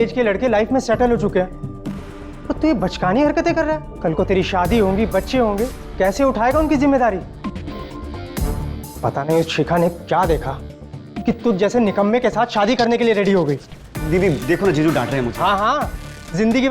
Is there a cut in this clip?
no; 0 cuts

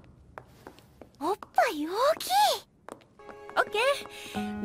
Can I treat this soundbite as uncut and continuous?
no; 1 cut; at 2.2 s

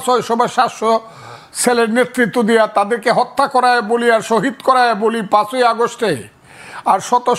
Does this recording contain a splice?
no; 0 cuts

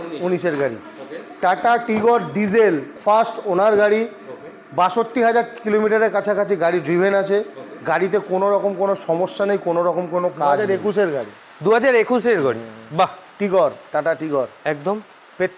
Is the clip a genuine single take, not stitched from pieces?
no; 2 cuts; at 2.9 s, 10.6 s

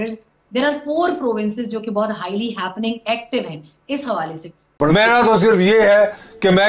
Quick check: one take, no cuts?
no; 1 cut; at 4.8 s

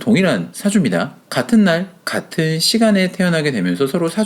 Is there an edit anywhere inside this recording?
no; 0 cuts

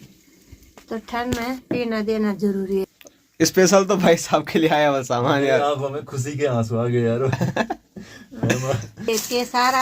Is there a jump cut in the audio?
yes; 2 cuts; at 2.9 s, 9.1 s

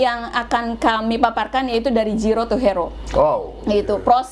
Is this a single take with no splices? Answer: yes; 0 cuts

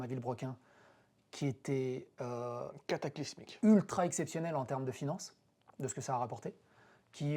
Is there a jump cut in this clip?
no; 0 cuts

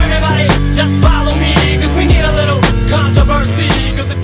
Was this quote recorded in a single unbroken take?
yes; 0 cuts

